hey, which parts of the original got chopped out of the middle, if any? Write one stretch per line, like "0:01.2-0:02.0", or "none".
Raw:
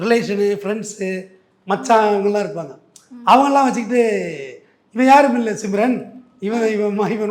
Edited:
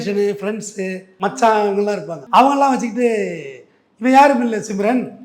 0:01.3-0:01.5
0:02.6-0:03.1